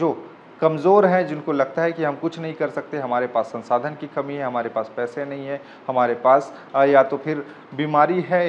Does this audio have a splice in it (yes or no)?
no